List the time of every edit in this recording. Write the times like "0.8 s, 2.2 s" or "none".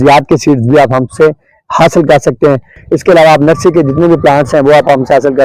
none